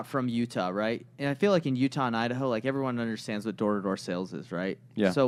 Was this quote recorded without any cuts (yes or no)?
yes